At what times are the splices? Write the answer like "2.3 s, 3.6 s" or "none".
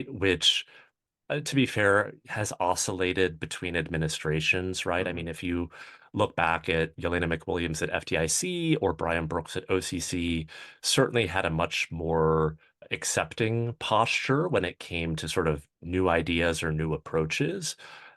15.8 s